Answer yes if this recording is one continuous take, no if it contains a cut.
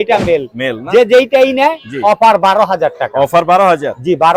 yes